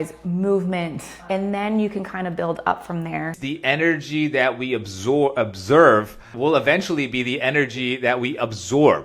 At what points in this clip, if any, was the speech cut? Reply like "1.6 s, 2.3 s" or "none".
1.2 s, 3.4 s, 6.3 s